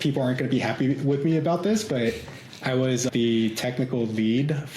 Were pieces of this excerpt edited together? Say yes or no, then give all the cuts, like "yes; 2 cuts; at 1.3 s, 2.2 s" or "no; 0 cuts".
yes; 1 cut; at 3.1 s